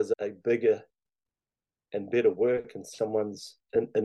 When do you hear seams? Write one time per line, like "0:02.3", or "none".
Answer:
none

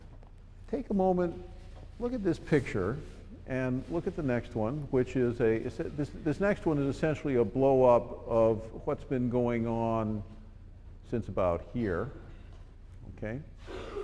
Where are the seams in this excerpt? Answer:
none

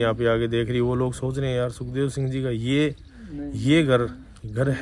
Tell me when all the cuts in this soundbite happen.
none

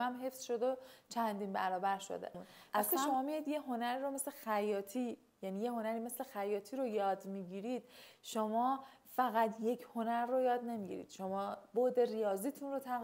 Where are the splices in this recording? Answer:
0:03.0

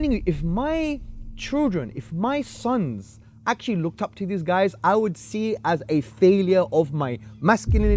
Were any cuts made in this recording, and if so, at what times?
none

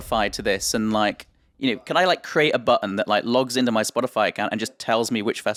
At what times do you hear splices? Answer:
none

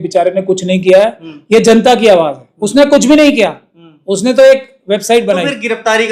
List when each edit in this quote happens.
none

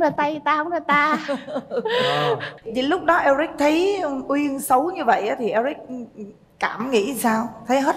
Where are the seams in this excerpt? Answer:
0:02.5

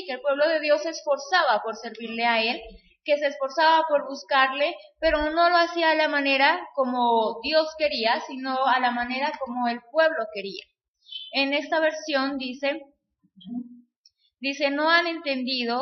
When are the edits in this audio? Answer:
none

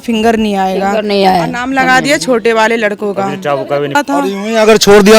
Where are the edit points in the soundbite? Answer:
0:04.0

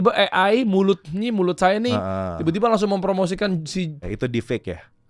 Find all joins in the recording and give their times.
0:04.1

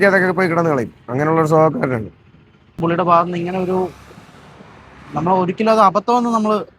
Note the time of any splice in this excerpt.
0:02.8

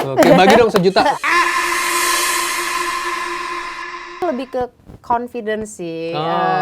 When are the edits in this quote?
0:04.1

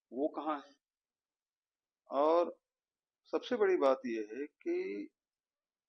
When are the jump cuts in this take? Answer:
none

